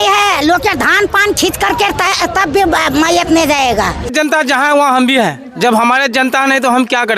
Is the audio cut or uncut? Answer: cut